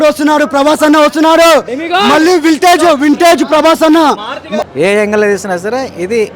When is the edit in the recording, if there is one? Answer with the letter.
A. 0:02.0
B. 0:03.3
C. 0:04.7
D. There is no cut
C